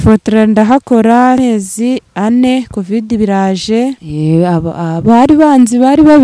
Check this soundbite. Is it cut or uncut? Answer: cut